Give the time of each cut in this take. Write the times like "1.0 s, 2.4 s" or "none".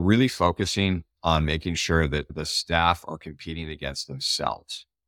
2.3 s